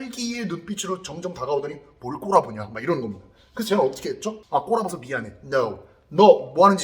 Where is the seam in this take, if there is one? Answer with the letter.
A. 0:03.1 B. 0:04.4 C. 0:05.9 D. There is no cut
B